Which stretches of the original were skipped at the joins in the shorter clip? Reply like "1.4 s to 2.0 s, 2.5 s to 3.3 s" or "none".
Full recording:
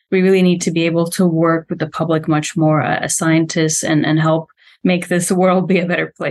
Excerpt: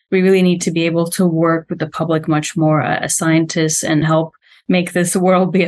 4.0 s to 4.2 s